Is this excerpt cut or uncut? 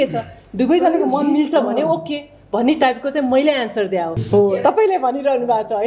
cut